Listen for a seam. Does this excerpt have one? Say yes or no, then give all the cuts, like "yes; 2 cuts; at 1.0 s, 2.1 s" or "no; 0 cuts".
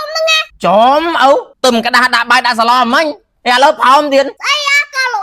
yes; 2 cuts; at 1.5 s, 4.4 s